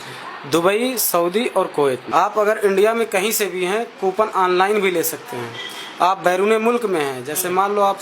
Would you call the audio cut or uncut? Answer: cut